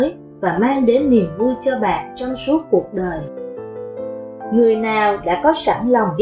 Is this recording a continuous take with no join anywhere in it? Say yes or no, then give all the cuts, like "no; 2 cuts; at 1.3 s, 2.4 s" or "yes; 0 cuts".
no; 2 cuts; at 3.2 s, 4.5 s